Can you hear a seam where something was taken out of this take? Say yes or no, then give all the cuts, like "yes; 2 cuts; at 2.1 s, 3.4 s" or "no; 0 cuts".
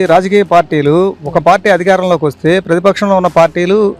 no; 0 cuts